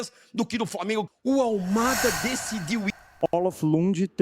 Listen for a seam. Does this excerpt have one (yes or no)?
yes